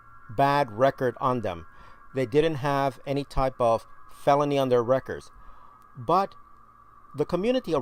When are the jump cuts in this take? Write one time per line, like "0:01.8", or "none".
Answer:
none